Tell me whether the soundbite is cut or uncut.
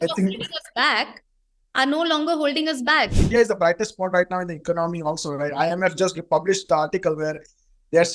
cut